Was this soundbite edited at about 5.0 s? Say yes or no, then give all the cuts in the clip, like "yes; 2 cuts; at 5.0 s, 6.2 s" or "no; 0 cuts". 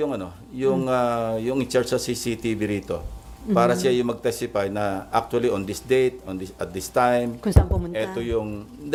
no; 0 cuts